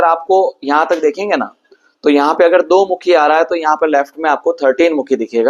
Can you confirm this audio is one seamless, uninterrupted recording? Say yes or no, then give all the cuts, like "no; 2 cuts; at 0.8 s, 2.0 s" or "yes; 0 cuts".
yes; 0 cuts